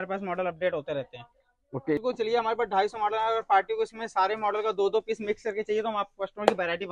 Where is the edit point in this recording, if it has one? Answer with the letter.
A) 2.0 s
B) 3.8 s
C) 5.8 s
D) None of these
A